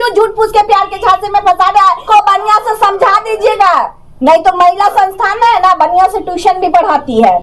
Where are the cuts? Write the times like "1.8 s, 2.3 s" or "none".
2.0 s